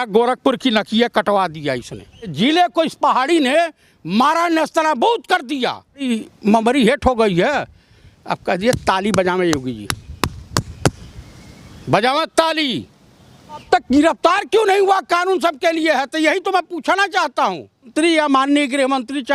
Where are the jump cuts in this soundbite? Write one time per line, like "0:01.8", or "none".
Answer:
0:02.3
0:05.9
0:13.6
0:17.9